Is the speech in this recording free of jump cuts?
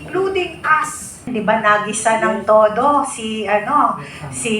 no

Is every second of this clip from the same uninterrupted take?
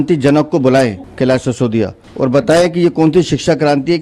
no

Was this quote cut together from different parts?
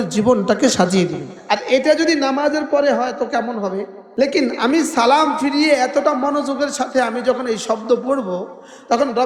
no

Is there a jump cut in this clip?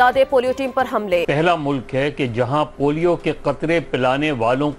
yes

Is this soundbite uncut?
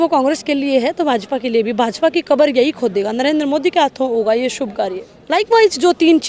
no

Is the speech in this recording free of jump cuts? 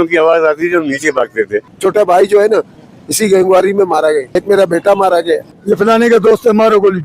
no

